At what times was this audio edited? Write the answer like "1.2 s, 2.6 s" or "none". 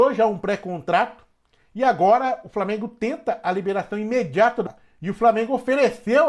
4.7 s